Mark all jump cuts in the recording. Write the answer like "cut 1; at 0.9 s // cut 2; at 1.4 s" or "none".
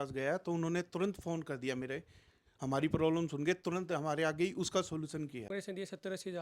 cut 1; at 5.5 s